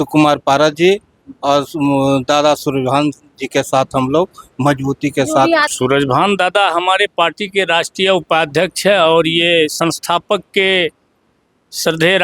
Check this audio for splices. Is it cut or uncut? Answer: cut